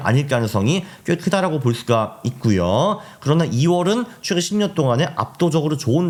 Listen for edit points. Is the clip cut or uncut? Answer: uncut